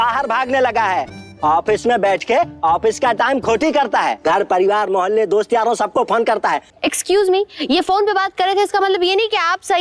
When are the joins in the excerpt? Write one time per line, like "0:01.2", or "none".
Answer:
0:06.7